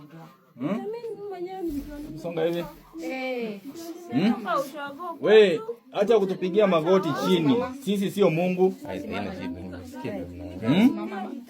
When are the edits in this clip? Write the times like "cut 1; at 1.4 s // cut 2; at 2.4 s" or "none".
none